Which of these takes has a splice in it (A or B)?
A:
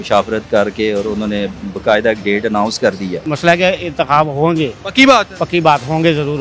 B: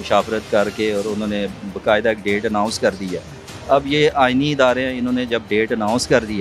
A